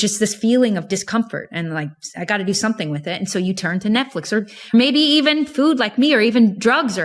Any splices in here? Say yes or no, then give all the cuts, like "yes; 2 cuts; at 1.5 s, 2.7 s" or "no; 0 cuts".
yes; 2 cuts; at 1.0 s, 4.7 s